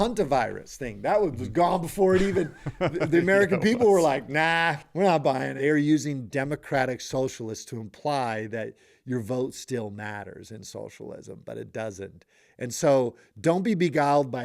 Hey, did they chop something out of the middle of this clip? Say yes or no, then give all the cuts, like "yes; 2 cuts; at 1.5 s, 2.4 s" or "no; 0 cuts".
yes; 1 cut; at 5.5 s